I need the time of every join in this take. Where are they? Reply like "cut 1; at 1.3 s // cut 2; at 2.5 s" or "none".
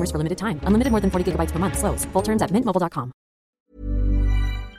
cut 1; at 3.6 s